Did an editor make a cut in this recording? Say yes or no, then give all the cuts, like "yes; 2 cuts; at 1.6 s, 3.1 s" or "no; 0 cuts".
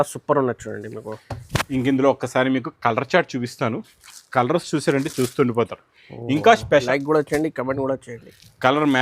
yes; 1 cut; at 6.9 s